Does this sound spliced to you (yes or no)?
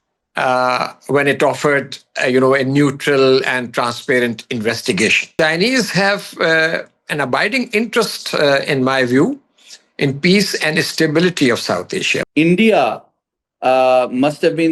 yes